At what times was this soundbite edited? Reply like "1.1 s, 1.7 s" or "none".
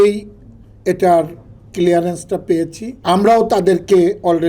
2.9 s